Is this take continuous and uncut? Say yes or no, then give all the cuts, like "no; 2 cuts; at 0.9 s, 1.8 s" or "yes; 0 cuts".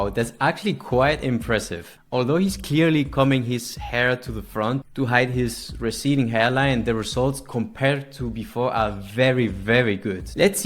yes; 0 cuts